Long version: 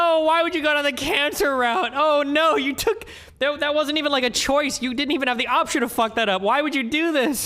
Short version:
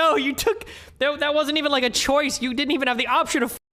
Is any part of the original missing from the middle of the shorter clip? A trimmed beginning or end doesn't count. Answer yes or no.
no